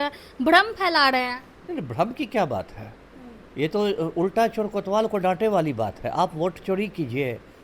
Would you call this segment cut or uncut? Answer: uncut